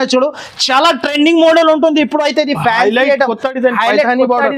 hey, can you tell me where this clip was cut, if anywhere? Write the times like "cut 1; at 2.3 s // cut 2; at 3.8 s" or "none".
none